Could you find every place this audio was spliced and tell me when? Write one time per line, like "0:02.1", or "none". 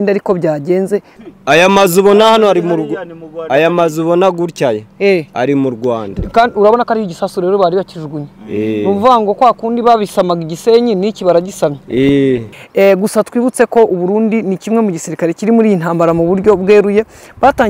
0:01.1
0:12.6